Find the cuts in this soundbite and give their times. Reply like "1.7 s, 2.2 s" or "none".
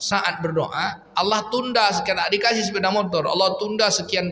none